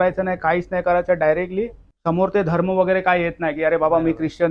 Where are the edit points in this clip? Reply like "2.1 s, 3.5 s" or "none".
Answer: 1.8 s